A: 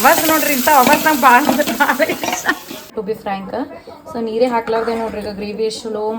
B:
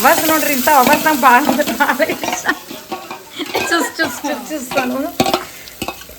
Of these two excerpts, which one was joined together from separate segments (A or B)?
A